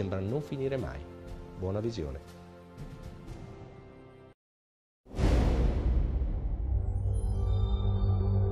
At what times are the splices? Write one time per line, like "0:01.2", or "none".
0:06.6

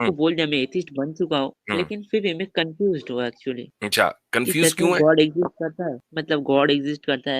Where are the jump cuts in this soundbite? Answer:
0:01.6
0:03.7
0:06.1

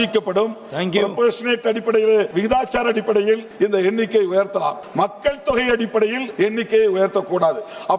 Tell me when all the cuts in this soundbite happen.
0:02.3
0:03.5
0:04.8
0:06.2

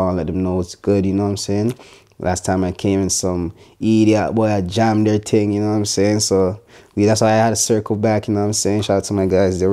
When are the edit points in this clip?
none

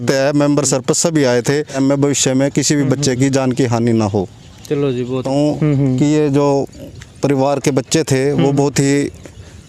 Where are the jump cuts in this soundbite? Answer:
0:01.8
0:05.2

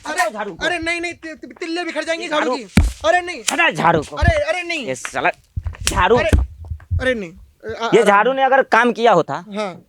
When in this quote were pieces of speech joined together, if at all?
none

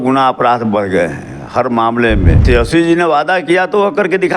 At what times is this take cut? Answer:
0:02.4

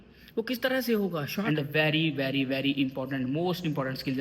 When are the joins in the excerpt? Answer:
0:01.5

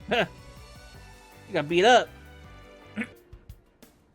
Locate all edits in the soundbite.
0:03.1

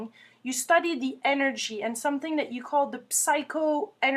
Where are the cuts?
0:02.8

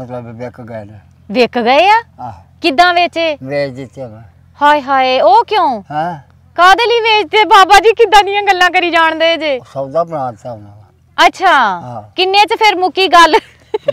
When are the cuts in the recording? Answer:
none

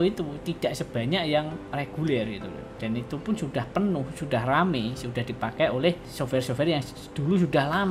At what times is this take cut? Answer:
0:02.8
0:06.1

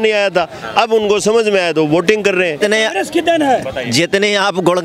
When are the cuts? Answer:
0:02.6

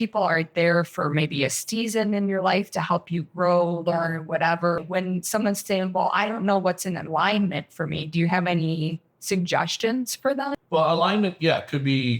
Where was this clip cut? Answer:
0:04.8
0:10.6

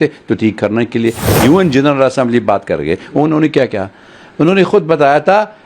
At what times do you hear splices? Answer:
0:01.2

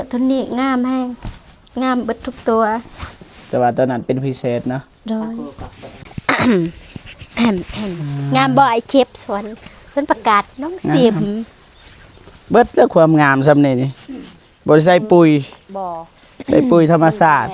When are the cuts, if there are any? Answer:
0:06.1

